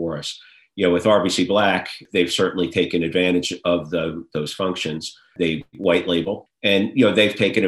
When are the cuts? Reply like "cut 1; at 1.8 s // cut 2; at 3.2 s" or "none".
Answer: cut 1; at 2.0 s // cut 2; at 5.3 s // cut 3; at 6.5 s